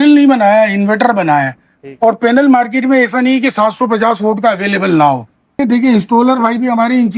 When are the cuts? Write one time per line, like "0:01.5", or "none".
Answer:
0:05.6